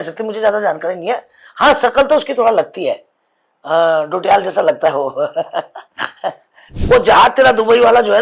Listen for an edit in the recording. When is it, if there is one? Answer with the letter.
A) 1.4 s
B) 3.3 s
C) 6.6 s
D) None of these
C